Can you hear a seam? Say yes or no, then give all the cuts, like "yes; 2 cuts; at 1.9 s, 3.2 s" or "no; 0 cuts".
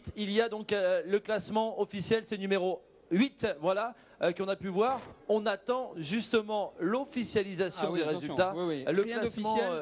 no; 0 cuts